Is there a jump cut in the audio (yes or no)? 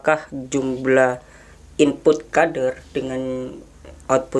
no